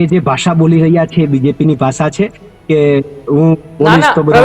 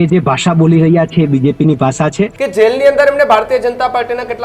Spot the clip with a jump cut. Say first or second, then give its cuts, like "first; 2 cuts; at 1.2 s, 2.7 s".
second; 1 cut; at 2.4 s